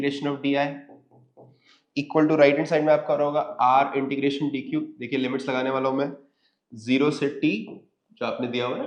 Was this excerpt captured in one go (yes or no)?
yes